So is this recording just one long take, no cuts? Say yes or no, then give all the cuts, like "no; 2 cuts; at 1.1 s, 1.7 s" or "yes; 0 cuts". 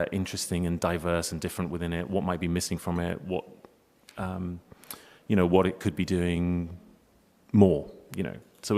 no; 1 cut; at 1.1 s